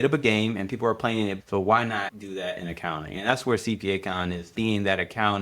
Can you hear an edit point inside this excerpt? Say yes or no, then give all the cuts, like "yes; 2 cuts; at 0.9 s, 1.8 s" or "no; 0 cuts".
yes; 3 cuts; at 1.3 s, 2.2 s, 4.4 s